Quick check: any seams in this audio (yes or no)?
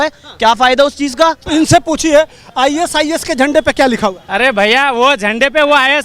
yes